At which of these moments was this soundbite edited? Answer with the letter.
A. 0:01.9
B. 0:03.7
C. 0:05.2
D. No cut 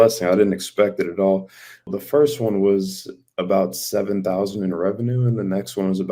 A